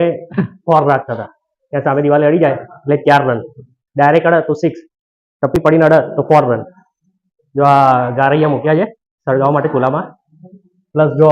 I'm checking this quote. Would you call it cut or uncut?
uncut